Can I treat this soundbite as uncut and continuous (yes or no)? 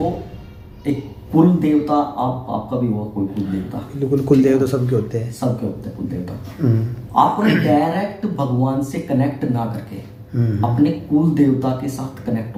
yes